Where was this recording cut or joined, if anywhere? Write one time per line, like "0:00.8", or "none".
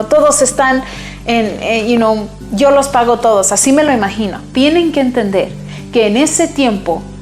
0:04.4